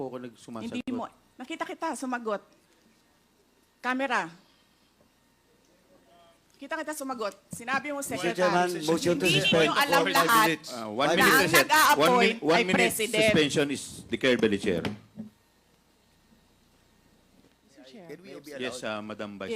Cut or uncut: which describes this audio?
uncut